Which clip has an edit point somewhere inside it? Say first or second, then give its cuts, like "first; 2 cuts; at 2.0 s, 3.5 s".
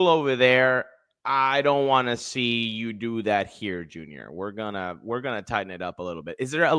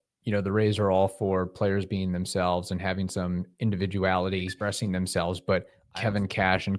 second; 2 cuts; at 4.5 s, 5.8 s